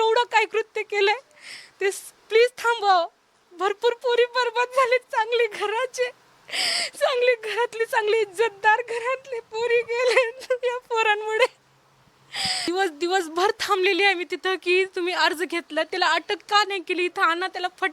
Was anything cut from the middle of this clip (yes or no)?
yes